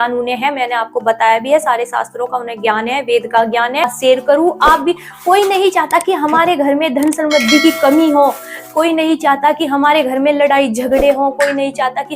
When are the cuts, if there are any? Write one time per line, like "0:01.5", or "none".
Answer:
0:03.9